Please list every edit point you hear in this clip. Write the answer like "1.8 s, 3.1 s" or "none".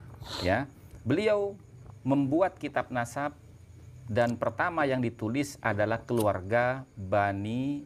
none